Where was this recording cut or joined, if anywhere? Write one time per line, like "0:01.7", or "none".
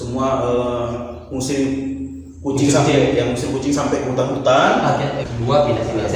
0:05.2